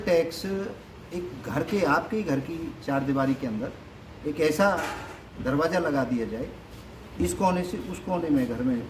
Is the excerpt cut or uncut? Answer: uncut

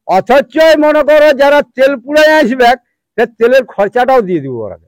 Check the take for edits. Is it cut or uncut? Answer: uncut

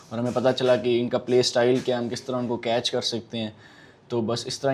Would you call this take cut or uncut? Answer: uncut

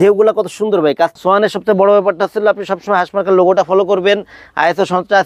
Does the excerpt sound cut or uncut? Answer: cut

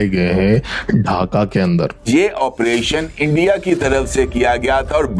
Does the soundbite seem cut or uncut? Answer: cut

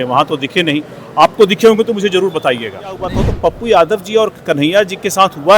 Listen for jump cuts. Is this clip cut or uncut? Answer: cut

